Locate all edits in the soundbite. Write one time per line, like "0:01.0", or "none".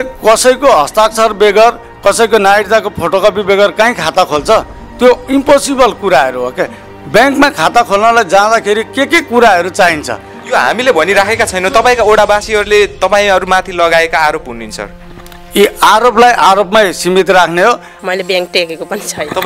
0:17.9